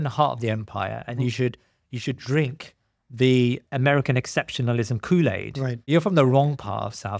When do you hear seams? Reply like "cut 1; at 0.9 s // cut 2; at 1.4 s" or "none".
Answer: cut 1; at 3.6 s // cut 2; at 5.9 s